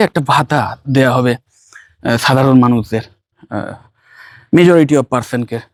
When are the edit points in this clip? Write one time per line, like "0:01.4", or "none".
none